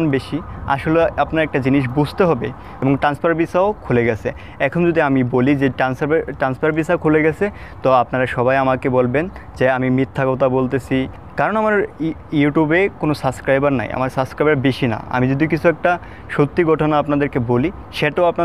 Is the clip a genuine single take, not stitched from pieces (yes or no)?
no